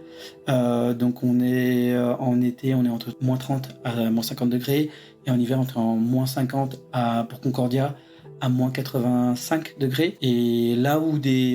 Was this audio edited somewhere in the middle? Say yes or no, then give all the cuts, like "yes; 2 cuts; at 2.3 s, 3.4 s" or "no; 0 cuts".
yes; 2 cuts; at 3.1 s, 10.2 s